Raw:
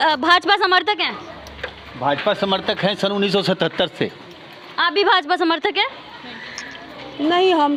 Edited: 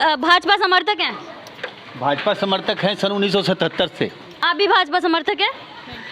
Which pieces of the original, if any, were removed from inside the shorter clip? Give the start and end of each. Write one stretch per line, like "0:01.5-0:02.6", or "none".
0:04.3-0:04.6